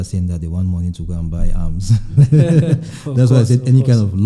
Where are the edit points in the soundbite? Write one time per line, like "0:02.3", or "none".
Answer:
none